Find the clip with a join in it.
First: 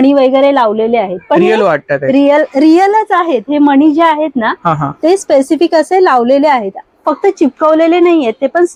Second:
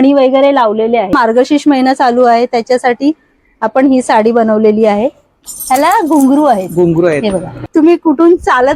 second; 3 cuts; at 1.1 s, 5.5 s, 7.6 s

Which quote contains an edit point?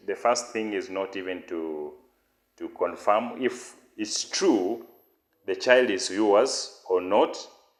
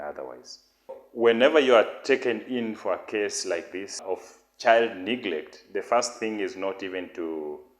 second; 2 cuts; at 1.0 s, 4.0 s

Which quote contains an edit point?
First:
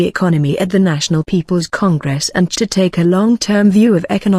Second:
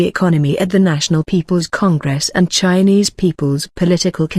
second; 1 cut; at 2.6 s

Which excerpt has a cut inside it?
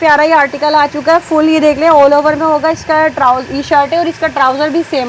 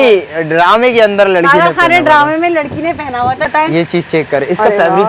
second; 1 cut; at 3.5 s

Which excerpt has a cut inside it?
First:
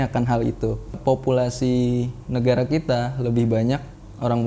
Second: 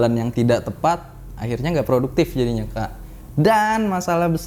first; 1 cut; at 0.9 s

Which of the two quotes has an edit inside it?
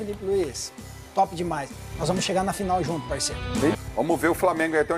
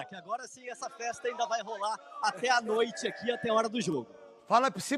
first; 1 cut; at 3.8 s

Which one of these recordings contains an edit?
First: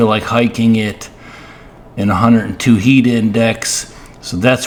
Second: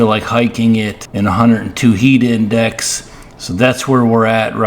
second; 1 cut; at 1.0 s

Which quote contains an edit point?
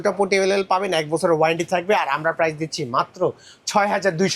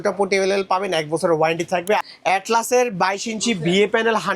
second; 1 cut; at 2.0 s

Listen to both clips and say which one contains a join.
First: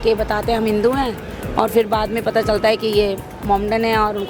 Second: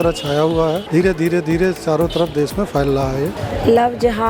second; 1 cut; at 3.4 s

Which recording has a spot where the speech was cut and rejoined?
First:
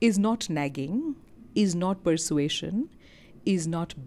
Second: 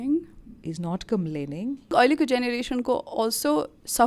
second; 1 cut; at 1.9 s

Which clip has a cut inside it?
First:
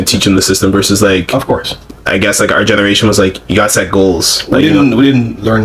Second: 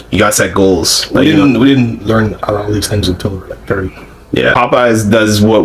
second; 1 cut; at 4.5 s

